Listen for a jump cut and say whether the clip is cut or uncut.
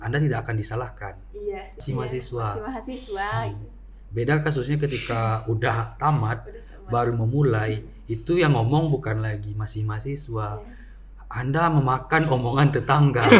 cut